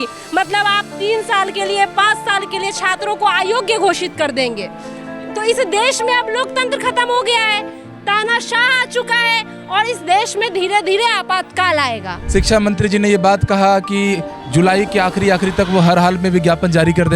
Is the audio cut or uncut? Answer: cut